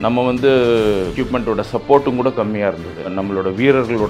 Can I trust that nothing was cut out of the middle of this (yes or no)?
no